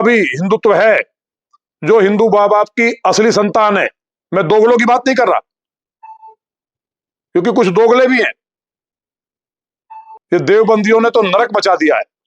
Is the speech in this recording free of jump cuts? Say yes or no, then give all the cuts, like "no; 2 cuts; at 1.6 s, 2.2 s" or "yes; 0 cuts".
no; 1 cut; at 10.2 s